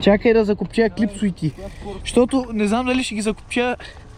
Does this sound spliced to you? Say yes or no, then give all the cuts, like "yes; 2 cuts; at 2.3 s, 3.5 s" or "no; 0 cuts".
no; 0 cuts